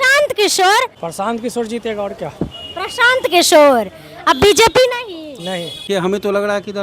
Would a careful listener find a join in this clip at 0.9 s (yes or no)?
yes